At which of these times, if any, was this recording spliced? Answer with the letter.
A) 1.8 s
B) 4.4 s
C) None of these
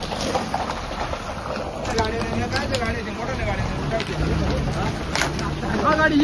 A